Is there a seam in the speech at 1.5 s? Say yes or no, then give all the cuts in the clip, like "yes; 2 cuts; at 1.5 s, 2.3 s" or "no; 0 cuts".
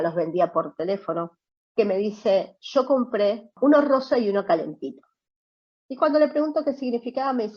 no; 1 cut; at 3.5 s